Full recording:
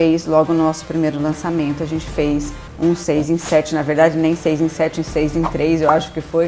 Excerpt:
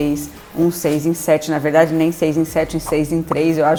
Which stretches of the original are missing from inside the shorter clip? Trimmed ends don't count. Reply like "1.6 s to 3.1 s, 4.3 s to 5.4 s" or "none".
none